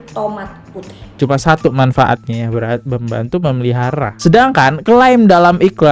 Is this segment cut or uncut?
cut